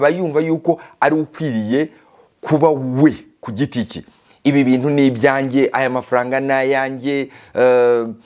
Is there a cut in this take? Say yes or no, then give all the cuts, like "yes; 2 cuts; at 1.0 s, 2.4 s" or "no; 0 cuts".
no; 0 cuts